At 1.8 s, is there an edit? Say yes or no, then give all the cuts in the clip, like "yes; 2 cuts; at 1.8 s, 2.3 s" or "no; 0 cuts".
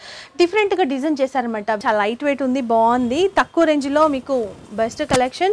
yes; 1 cut; at 1.8 s